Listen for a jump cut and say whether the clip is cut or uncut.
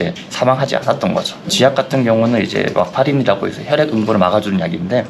cut